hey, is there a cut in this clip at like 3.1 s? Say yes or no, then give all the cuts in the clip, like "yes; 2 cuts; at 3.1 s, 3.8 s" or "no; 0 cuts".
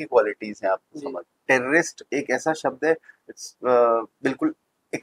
no; 1 cut; at 1.3 s